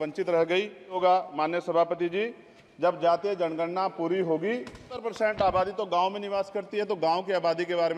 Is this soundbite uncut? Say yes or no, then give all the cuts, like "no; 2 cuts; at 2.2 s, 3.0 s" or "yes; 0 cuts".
no; 2 cuts; at 1.0 s, 5.0 s